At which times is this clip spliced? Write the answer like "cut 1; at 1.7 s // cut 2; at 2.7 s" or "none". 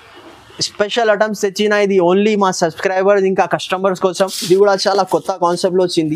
cut 1; at 4.4 s